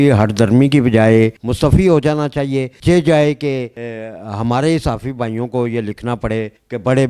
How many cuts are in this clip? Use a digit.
1